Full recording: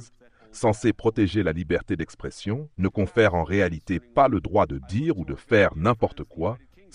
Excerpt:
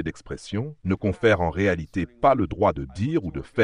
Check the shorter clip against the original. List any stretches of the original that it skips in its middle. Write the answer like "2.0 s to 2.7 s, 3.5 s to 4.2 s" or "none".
none